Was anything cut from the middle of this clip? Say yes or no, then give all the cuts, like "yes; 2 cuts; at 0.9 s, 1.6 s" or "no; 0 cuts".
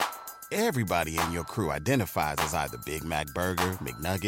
no; 0 cuts